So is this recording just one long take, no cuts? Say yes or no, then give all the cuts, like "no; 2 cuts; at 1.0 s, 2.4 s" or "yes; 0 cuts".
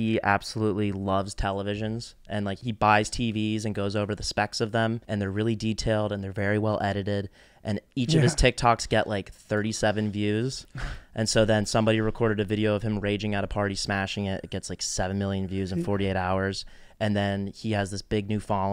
no; 2 cuts; at 2.6 s, 5.0 s